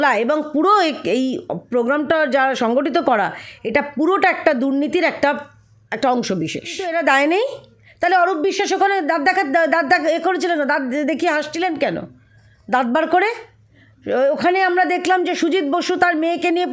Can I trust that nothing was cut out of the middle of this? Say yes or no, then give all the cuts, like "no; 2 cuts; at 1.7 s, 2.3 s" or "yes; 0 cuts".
no; 1 cut; at 6.8 s